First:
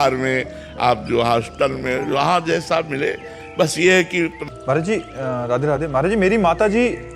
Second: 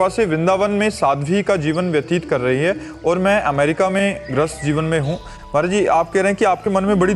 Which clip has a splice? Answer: first; 1 cut; at 4.4 s

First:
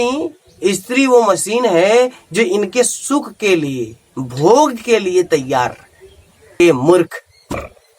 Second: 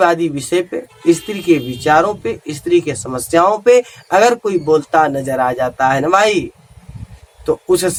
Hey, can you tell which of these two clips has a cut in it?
first; 1 cut; at 6.6 s

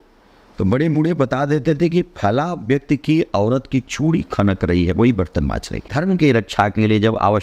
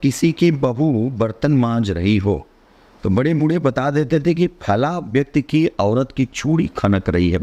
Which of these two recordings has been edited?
first; 1 cut; at 5.9 s

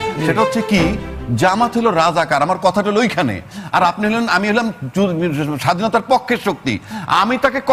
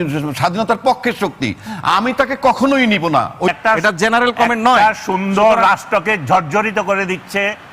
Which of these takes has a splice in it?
second; 1 cut; at 3.5 s

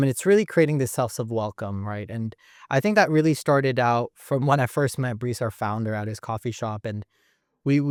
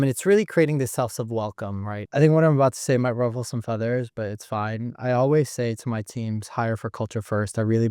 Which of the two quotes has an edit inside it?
second; 1 cut; at 2.0 s

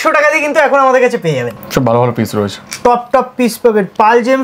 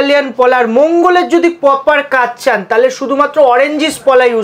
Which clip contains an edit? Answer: first; 1 cut; at 1.6 s

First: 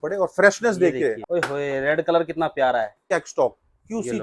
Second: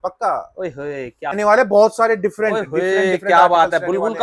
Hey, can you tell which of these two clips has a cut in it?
first; 2 cuts; at 1.2 s, 3.0 s

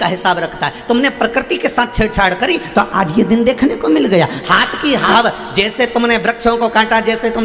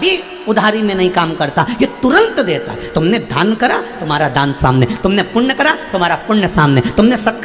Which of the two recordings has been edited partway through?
first; 1 cut; at 5.0 s

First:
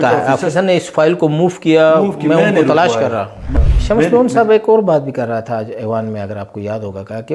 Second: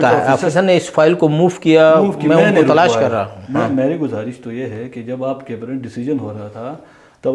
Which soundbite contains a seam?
first; 1 cut; at 3.4 s

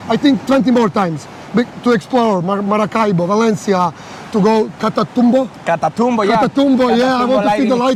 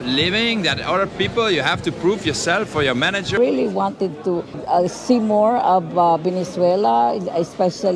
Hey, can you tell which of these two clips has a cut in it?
second; 2 cuts; at 3.4 s, 4.5 s

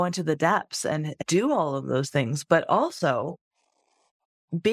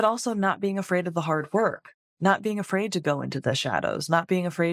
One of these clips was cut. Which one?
first; 1 cut; at 1.1 s

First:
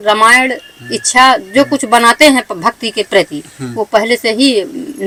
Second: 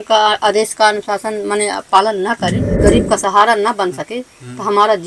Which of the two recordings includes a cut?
second; 1 cut; at 2.8 s

